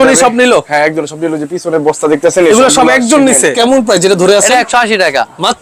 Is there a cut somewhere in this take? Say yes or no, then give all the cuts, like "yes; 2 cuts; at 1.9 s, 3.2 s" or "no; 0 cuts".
yes; 1 cut; at 3.5 s